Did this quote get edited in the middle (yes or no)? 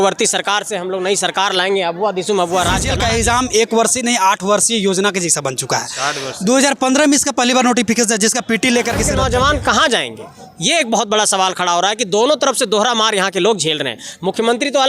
yes